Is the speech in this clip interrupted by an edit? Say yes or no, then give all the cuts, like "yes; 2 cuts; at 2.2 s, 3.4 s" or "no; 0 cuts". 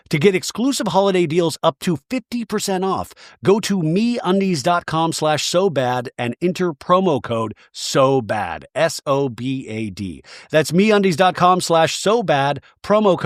no; 0 cuts